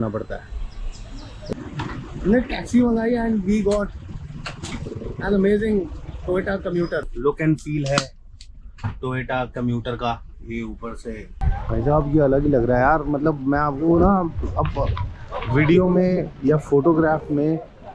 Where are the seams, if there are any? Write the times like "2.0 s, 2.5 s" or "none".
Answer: 1.5 s, 7.1 s, 11.4 s